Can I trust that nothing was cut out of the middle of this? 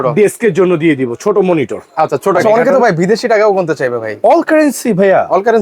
no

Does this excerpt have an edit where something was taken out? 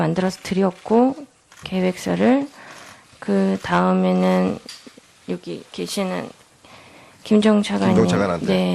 no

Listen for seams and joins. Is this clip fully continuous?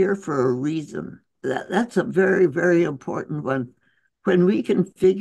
no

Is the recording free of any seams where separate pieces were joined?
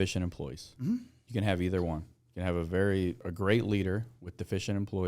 no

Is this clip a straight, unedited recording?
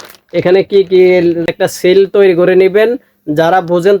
no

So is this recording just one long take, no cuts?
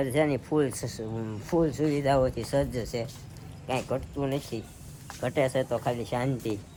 yes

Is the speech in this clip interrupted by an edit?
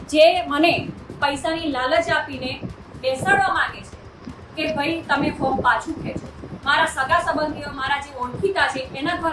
no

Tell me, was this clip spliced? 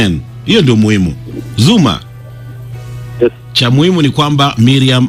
no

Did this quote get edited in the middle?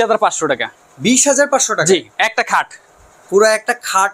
no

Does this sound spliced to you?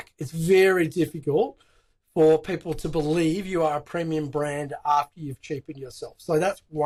no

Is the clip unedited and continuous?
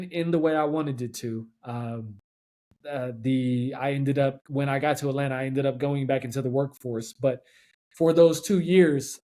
no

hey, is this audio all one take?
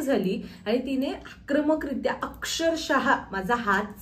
yes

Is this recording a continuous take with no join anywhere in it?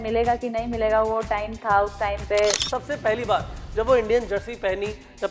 no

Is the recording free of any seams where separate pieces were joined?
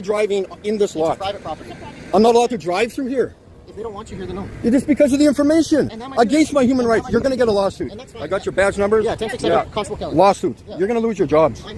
yes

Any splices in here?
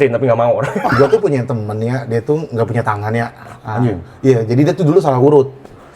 yes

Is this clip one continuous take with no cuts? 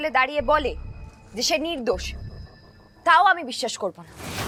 yes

